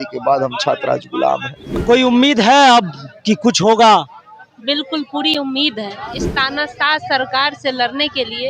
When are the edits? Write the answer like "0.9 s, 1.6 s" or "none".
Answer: 1.8 s